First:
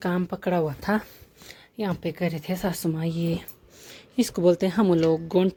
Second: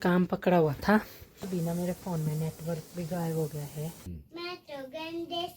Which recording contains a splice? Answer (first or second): second